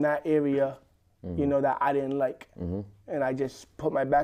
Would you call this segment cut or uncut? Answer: uncut